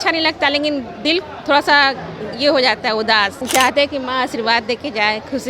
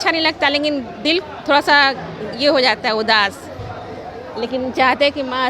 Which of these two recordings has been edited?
first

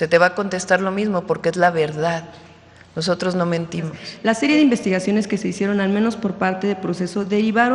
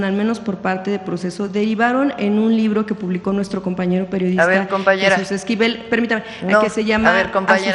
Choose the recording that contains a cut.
first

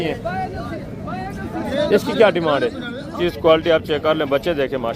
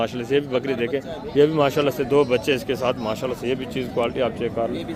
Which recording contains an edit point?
first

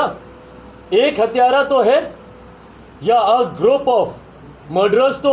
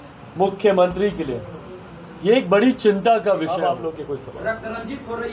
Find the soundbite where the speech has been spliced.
second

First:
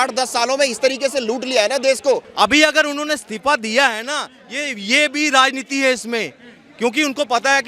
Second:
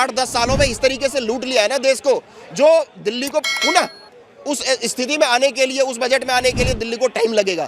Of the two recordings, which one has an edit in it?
first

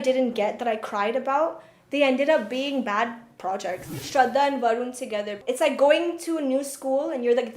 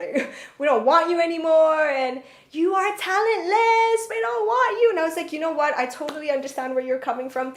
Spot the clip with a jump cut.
first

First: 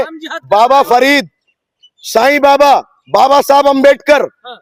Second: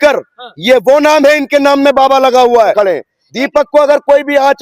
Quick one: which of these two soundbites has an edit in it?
second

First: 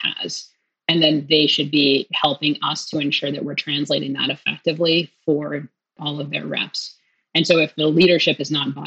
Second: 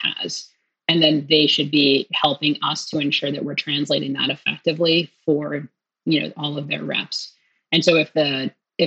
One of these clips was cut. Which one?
first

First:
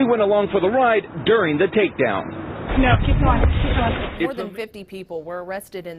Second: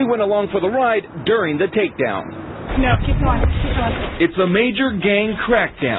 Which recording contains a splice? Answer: first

